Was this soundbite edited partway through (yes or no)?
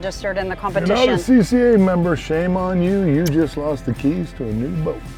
no